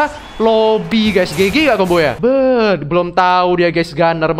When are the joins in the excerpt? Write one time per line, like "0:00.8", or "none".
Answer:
0:02.2